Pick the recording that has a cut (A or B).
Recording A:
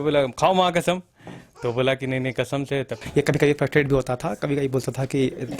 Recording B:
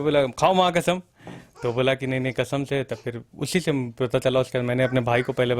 A